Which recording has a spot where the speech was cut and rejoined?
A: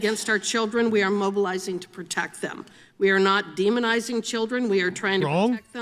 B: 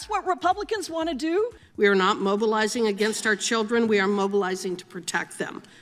B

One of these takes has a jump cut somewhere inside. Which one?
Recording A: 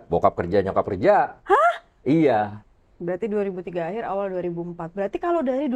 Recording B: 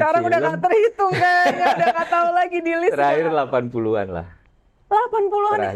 A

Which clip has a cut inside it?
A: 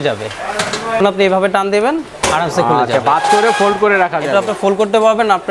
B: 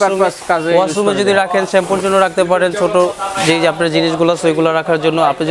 A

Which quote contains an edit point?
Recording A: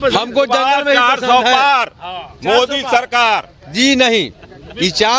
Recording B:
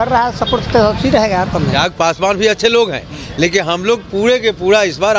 B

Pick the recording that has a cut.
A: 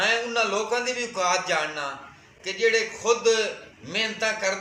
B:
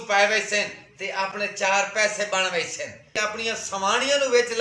B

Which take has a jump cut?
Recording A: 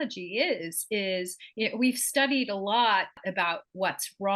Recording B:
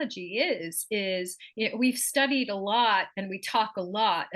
A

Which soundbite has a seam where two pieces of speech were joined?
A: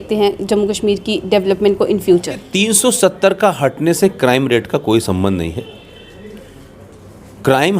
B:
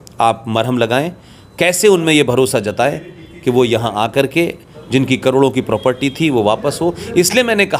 A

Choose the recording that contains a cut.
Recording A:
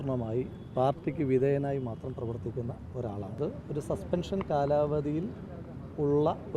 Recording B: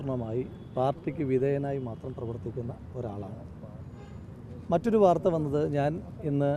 A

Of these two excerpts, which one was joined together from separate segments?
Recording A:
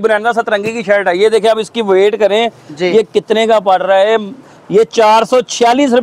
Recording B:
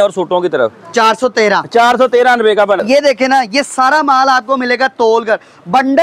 B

